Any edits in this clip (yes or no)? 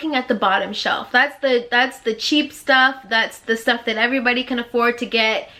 no